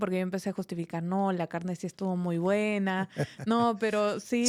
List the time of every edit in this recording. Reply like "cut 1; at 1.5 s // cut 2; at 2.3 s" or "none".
none